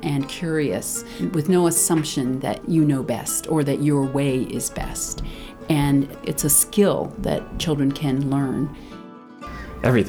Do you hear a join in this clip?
yes; 5 cuts; at 1.1 s, 2.6 s, 6.1 s, 7.5 s, 9.2 s

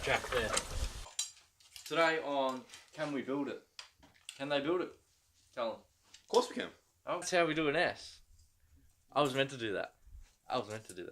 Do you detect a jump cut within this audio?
yes; 2 cuts; at 1.2 s, 7.3 s

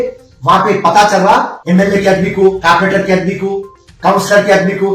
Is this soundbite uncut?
no; 1 cut; at 1.6 s

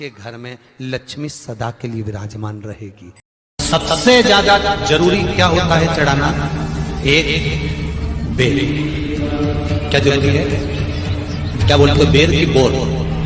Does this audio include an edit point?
yes; 1 cut; at 3.4 s

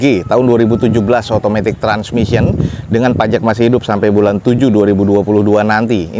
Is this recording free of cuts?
yes; 0 cuts

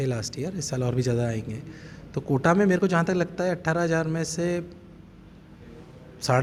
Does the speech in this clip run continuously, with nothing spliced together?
yes; 0 cuts

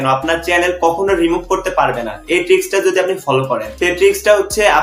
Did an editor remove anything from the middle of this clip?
yes; 1 cut; at 3.7 s

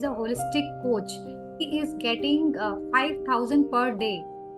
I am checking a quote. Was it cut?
yes; 1 cut; at 1.6 s

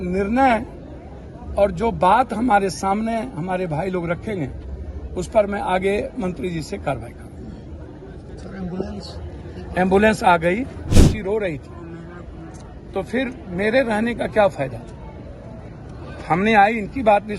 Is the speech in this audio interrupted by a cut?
yes; 1 cut; at 10.9 s

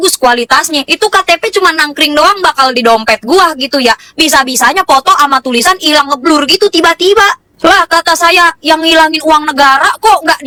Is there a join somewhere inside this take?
no; 0 cuts

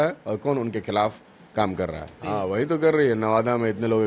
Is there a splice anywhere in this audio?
yes; 1 cut; at 2.1 s

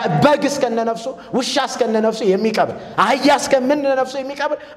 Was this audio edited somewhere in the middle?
no; 0 cuts

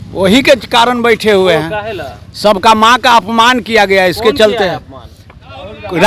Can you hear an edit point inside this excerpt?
no; 0 cuts

